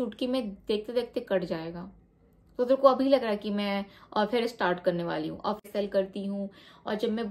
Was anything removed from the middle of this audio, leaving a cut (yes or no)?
yes